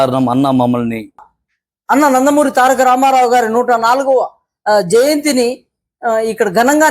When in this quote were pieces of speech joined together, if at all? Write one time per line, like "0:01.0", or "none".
0:01.3